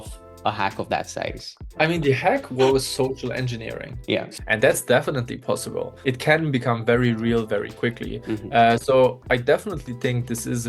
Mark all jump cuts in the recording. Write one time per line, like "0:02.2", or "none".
0:04.3
0:05.9